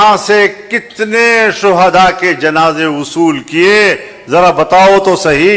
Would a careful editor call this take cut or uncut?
uncut